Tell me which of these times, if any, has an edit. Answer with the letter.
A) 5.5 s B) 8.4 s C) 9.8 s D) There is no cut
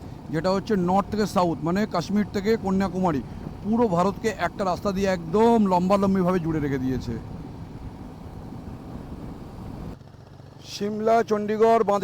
D